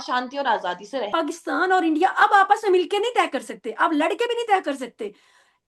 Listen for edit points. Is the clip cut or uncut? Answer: cut